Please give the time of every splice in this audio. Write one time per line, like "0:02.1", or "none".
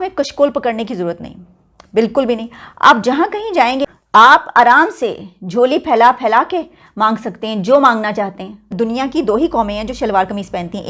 0:03.9
0:08.7